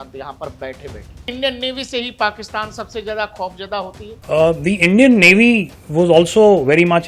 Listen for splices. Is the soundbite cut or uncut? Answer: cut